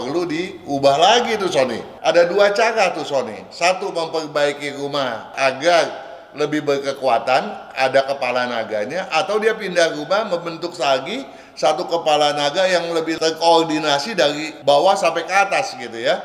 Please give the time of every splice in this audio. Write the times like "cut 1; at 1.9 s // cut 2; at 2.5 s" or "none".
cut 1; at 1.9 s // cut 2; at 5.3 s // cut 3; at 13.2 s // cut 4; at 14.5 s

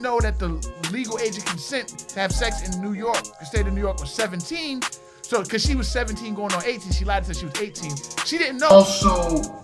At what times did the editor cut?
cut 1; at 8.7 s

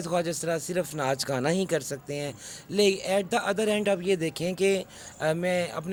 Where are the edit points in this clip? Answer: none

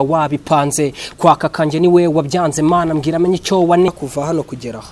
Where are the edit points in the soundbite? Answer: cut 1; at 3.9 s

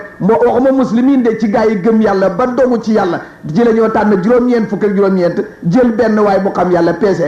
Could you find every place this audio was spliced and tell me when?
none

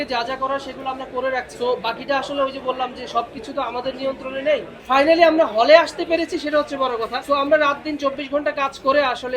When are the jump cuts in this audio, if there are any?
cut 1; at 1.5 s // cut 2; at 4.7 s // cut 3; at 7.2 s

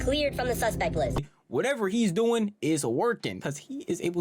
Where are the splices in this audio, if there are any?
cut 1; at 1.3 s

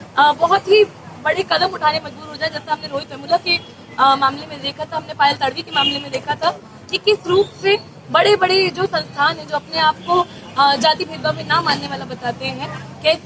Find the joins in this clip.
none

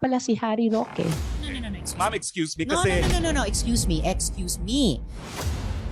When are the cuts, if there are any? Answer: cut 1; at 2.9 s

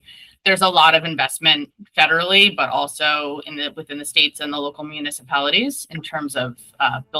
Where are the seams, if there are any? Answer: none

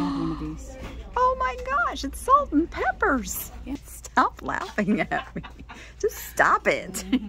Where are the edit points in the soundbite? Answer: cut 1; at 3.9 s

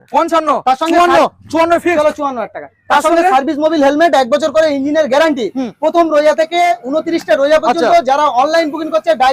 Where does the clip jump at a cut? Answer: none

